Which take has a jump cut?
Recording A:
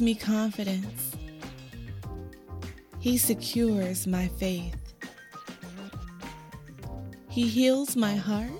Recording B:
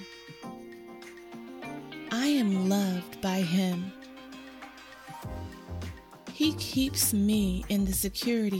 A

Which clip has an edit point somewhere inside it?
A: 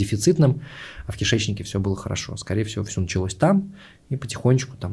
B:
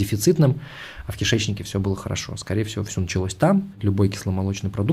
B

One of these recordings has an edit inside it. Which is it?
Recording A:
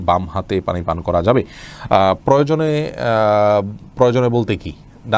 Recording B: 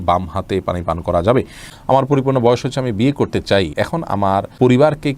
B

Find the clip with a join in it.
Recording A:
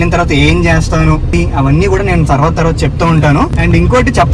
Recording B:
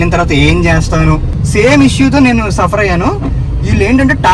B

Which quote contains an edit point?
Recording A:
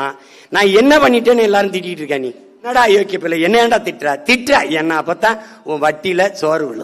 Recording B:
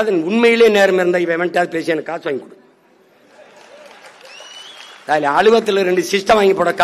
A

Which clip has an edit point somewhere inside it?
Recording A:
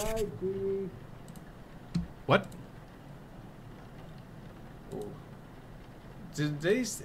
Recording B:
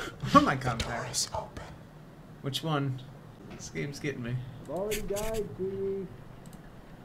B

